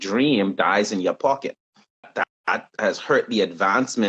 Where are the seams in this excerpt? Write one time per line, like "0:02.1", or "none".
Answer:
0:02.1